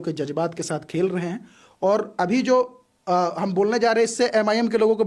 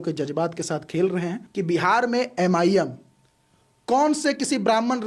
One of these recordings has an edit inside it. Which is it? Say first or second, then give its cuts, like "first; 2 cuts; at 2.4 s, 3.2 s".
second; 1 cut; at 1.4 s